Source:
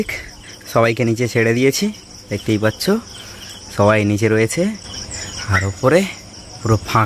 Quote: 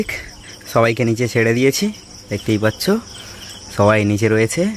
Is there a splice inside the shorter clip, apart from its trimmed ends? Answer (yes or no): no